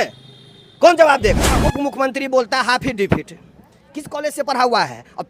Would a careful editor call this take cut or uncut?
cut